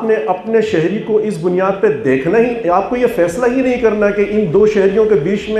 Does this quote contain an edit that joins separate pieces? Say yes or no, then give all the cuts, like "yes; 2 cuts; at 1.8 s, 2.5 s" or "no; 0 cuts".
no; 0 cuts